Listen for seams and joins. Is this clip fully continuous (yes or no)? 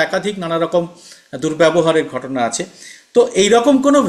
yes